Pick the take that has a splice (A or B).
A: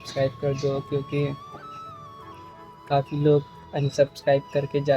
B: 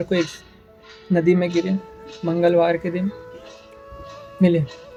A